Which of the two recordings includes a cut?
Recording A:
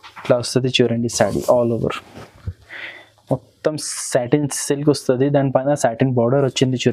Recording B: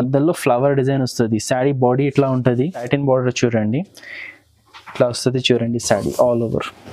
B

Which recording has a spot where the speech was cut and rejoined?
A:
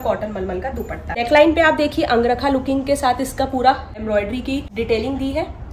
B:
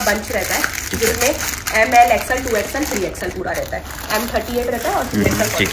A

